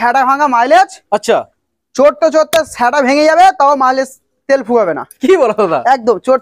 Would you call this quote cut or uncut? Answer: uncut